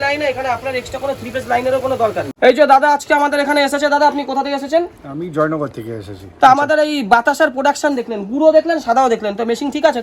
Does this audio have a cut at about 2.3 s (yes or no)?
yes